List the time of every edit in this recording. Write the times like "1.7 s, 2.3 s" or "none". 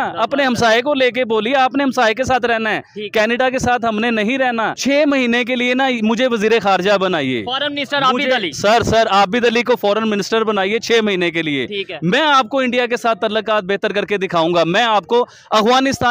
4.8 s